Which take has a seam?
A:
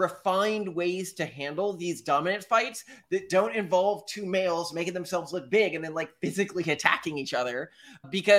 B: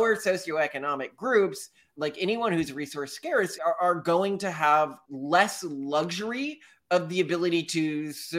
B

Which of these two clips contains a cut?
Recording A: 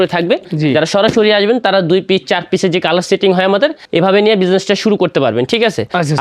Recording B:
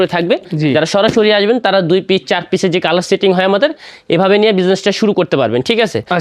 A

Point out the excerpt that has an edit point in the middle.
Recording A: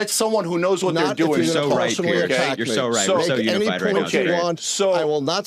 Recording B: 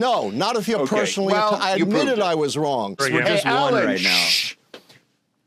B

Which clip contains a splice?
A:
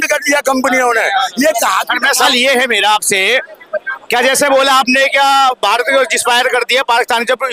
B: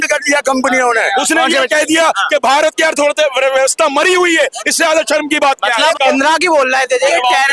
B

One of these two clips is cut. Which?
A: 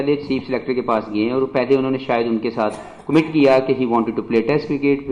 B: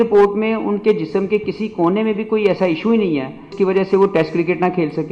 B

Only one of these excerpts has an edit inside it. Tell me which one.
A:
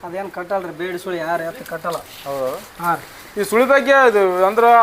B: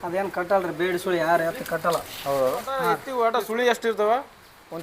B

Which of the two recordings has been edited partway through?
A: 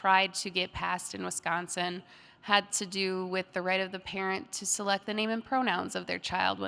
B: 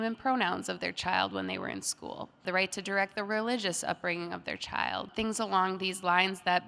B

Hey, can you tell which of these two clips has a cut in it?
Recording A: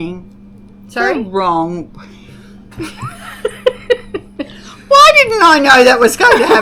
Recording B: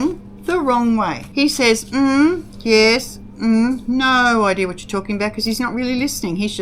B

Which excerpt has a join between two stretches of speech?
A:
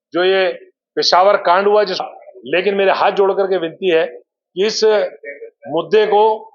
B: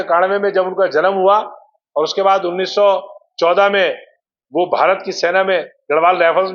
A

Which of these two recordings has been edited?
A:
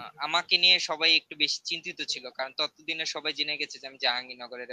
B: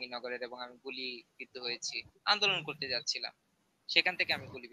B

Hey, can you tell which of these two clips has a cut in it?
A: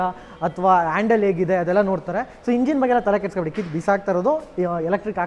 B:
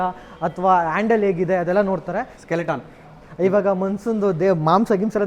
B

